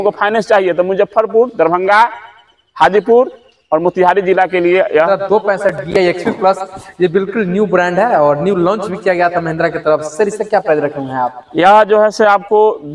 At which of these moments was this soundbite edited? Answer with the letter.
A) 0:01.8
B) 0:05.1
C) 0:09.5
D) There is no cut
B